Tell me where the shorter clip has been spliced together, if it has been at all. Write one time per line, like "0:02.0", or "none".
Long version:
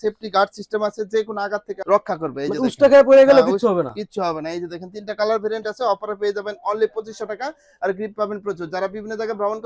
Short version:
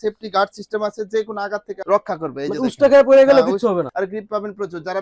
0:03.9